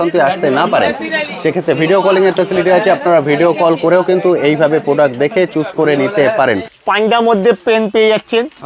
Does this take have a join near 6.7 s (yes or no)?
yes